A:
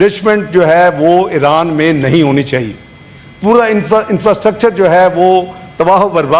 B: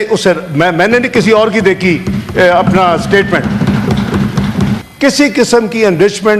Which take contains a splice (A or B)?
B